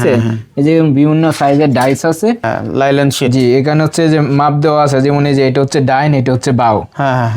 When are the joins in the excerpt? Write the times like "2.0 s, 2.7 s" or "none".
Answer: 2.4 s